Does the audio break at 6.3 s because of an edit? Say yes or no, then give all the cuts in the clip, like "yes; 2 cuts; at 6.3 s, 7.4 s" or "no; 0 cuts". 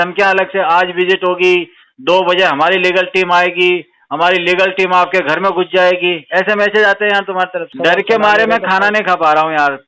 no; 1 cut; at 7.7 s